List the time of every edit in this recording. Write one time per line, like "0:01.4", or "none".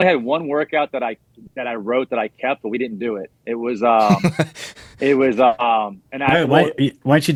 none